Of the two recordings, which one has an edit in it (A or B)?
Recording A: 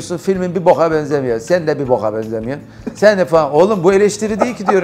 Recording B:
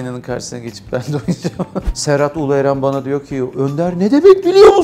B